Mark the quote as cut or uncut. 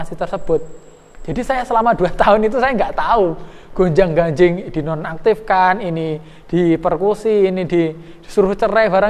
uncut